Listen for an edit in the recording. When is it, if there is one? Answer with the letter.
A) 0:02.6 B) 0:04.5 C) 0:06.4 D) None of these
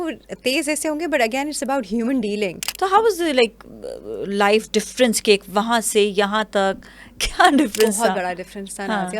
A